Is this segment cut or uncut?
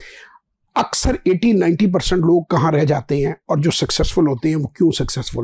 uncut